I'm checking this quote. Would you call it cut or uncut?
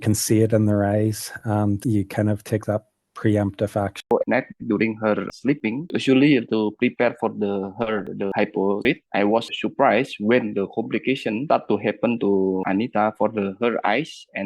cut